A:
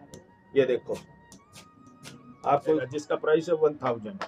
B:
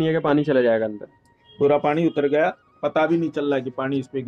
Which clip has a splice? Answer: A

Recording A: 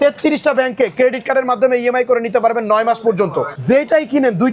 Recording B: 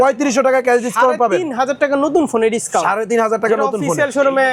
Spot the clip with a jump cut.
A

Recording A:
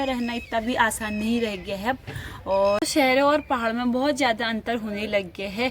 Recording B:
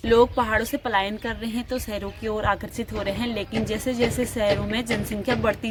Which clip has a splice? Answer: A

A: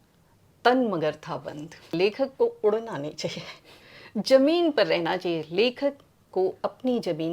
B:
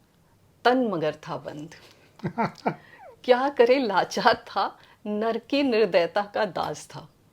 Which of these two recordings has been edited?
A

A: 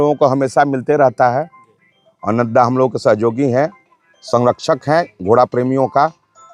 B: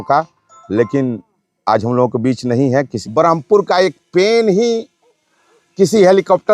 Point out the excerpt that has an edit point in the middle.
B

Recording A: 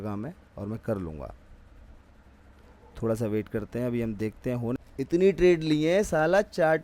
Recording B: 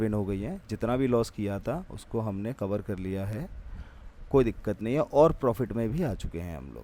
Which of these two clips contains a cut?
A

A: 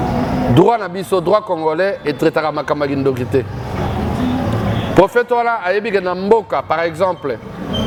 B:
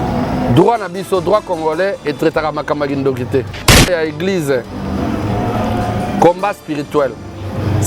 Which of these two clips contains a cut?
B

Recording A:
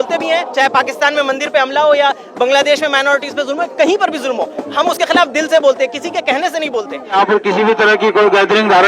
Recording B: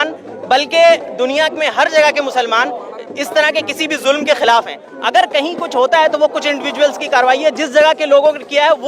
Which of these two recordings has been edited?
A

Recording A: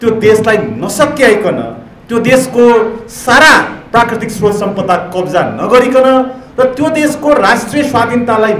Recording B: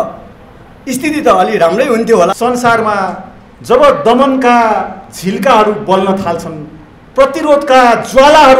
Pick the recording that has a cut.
B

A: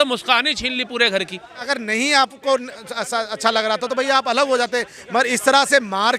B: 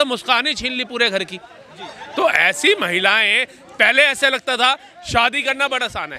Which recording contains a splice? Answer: A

